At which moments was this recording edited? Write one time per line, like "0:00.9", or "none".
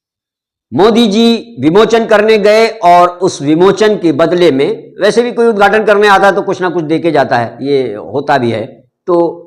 none

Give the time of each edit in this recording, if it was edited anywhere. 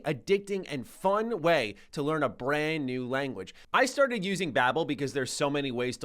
0:03.6

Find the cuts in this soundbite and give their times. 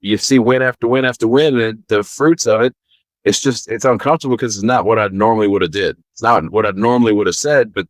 none

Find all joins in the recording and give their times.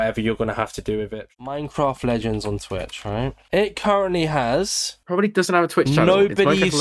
0:01.2

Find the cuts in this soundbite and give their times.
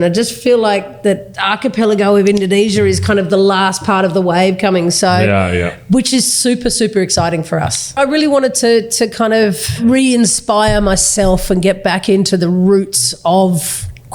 0:01.3
0:08.0
0:09.7

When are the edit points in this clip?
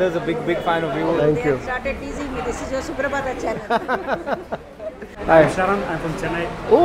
0:01.2
0:05.2

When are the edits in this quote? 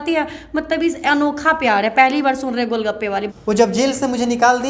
0:03.3

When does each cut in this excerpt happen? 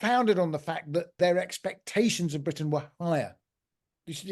0:01.2

